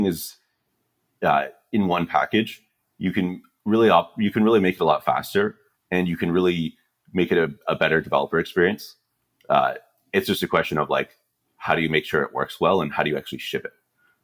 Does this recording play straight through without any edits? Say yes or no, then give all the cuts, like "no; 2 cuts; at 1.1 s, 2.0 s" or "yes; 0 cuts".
yes; 0 cuts